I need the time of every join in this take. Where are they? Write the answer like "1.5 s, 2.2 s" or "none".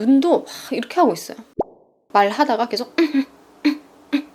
1.6 s